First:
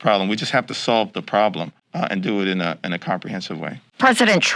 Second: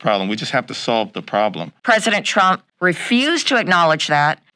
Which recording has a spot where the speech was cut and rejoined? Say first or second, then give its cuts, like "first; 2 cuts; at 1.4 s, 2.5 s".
second; 1 cut; at 1.8 s